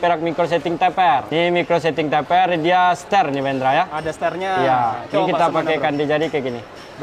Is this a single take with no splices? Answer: yes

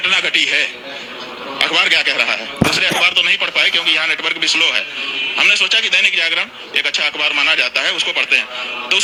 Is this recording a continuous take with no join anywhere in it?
yes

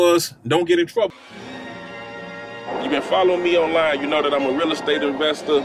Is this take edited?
yes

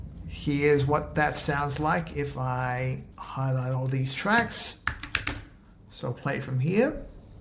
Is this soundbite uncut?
yes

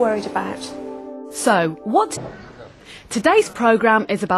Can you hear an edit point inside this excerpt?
no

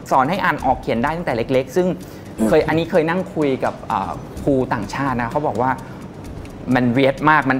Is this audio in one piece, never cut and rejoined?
yes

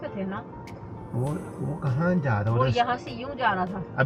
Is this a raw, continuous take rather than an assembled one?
yes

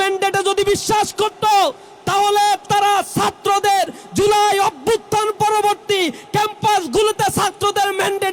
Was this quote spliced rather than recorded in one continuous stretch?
no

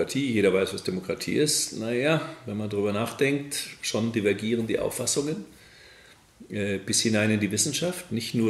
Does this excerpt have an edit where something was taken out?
no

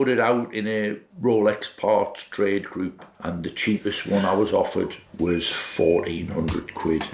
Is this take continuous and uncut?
yes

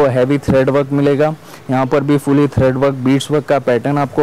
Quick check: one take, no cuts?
yes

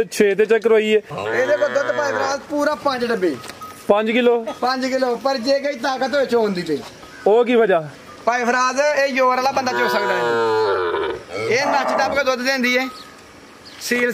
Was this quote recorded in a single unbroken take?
no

